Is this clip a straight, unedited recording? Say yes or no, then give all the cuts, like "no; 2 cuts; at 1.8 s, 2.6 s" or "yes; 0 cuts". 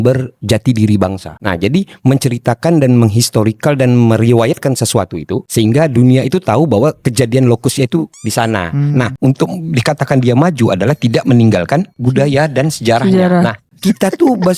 no; 3 cuts; at 5.5 s, 9.2 s, 13.7 s